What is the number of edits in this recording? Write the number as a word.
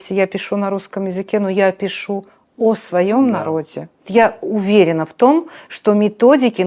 one